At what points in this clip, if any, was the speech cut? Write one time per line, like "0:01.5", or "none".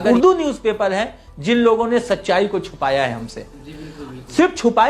none